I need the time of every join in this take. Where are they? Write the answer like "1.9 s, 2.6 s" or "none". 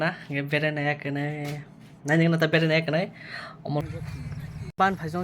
3.8 s